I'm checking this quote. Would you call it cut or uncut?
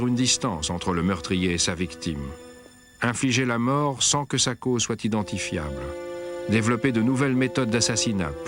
uncut